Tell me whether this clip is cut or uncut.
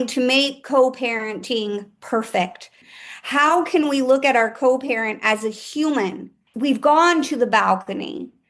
cut